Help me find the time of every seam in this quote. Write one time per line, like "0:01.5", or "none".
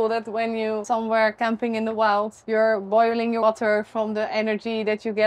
0:00.8
0:02.4
0:03.4